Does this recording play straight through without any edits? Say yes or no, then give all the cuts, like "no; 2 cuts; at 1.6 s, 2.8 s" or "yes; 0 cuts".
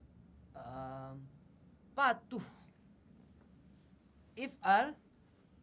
yes; 0 cuts